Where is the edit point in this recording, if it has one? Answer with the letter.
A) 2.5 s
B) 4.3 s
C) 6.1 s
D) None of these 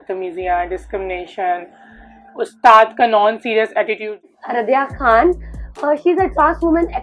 B